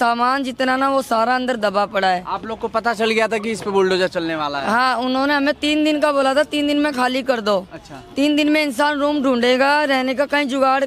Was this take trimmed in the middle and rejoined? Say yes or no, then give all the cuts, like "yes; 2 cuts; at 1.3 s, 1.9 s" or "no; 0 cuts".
no; 0 cuts